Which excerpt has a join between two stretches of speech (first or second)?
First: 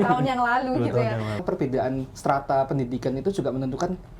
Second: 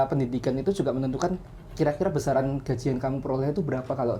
first